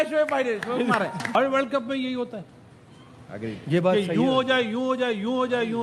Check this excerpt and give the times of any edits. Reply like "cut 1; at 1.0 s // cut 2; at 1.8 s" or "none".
cut 1; at 1.3 s